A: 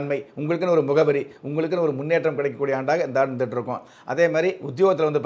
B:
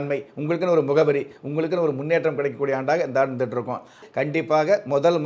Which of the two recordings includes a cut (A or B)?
B